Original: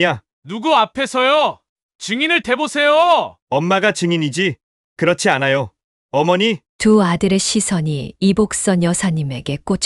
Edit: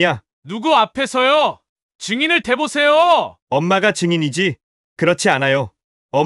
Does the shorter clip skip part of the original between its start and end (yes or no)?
no